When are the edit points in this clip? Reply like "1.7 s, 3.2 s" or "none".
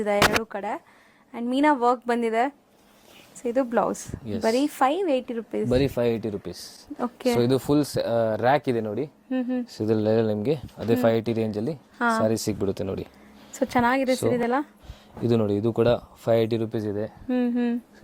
none